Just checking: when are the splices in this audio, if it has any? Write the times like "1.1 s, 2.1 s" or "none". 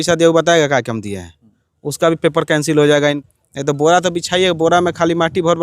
3.2 s